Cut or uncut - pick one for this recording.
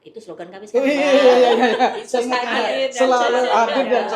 uncut